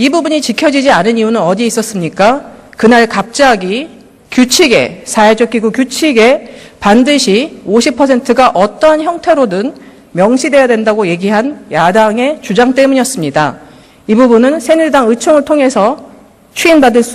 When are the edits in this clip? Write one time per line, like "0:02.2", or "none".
0:02.0